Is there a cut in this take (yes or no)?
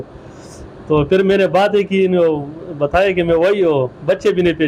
no